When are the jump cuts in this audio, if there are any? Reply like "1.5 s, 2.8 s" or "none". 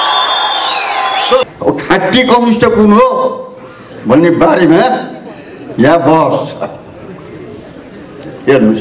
1.4 s